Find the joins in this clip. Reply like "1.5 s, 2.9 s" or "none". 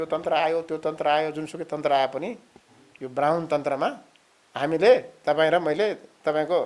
none